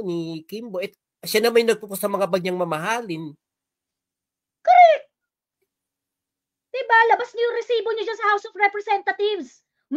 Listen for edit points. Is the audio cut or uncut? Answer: uncut